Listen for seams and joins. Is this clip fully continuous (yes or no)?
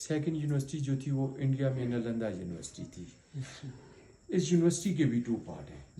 yes